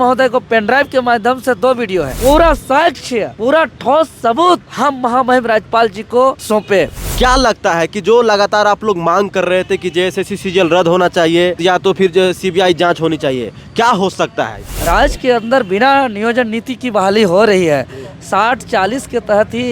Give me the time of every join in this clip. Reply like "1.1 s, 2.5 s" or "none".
2.2 s, 3.3 s, 4.7 s, 6.8 s, 11.6 s, 14.7 s

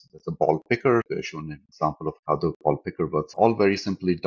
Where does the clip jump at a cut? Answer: 1.1 s, 3.3 s

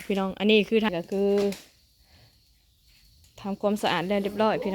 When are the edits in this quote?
0.9 s

